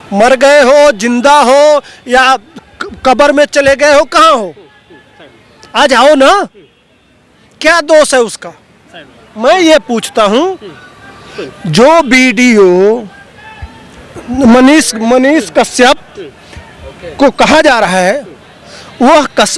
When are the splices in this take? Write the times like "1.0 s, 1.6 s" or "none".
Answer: none